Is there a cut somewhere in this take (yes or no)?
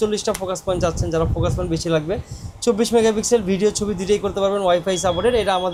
no